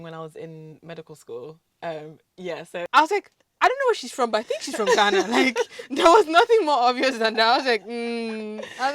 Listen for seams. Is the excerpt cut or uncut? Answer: cut